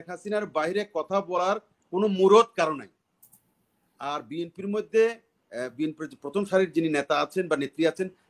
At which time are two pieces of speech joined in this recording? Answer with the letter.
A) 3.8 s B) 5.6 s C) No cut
C